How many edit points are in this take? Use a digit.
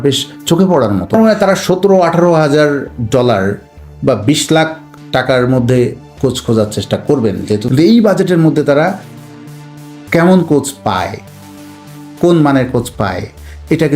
2